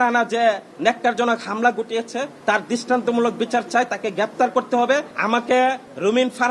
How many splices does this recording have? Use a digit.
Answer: 1